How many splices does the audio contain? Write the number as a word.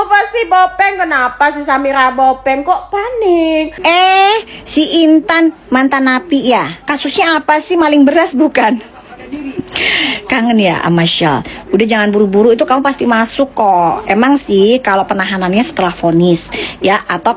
one